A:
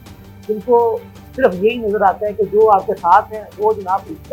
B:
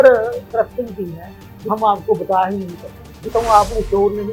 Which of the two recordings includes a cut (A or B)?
B